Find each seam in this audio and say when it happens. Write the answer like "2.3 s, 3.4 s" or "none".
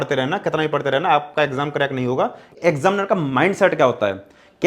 2.5 s